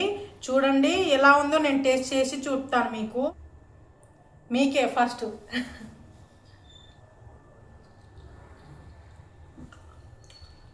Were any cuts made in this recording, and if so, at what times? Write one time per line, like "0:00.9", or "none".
0:03.3
0:06.9
0:09.7

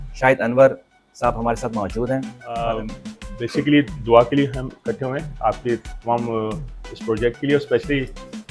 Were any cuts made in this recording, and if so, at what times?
0:02.4

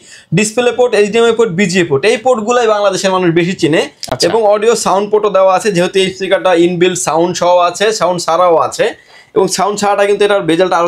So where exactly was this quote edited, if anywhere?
none

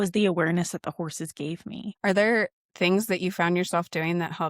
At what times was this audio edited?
0:01.9

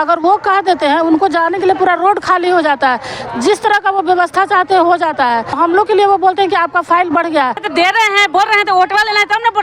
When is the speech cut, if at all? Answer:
0:05.5
0:07.6

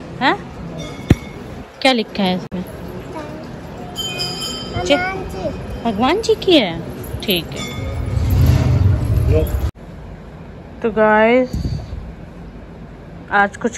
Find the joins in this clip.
none

